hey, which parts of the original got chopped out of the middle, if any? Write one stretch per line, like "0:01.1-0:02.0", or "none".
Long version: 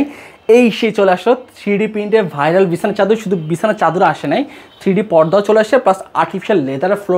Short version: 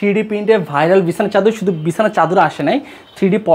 none

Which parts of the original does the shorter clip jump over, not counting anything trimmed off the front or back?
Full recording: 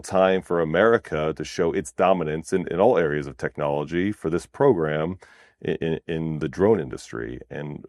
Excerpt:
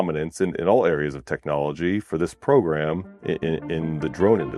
0:05.2-0:05.5

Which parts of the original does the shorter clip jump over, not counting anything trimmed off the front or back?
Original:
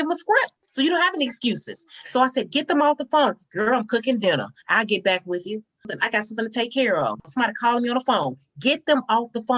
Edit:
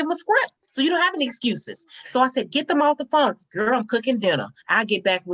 none

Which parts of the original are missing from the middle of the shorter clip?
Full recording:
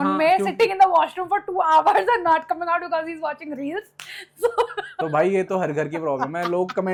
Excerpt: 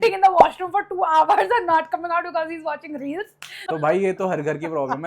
0:04.1-0:04.8

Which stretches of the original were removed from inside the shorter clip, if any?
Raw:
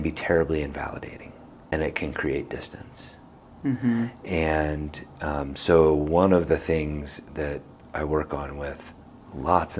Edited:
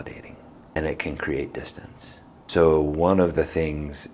0:03.4-0:05.5

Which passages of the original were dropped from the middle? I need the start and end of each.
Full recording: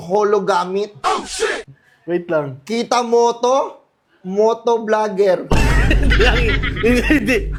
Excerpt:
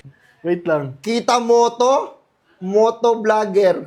none

